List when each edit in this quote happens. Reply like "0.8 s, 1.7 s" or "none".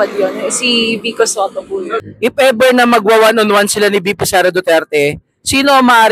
2.0 s